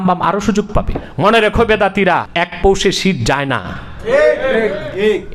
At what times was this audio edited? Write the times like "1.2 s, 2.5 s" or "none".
1.0 s, 2.3 s